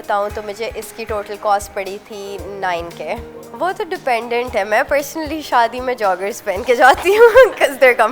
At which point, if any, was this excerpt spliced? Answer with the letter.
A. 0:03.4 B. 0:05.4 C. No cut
A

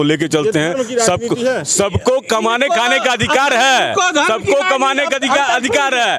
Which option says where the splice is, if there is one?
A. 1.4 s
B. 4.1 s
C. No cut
C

